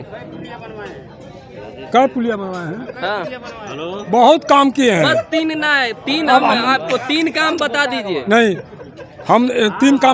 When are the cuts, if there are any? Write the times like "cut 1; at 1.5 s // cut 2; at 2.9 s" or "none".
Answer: none